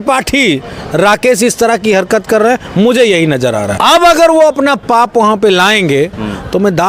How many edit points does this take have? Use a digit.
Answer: 1